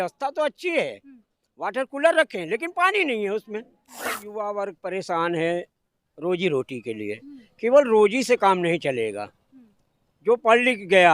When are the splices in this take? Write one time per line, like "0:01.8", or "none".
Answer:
0:04.3